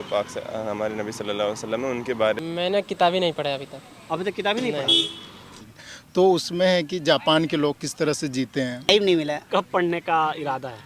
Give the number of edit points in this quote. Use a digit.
3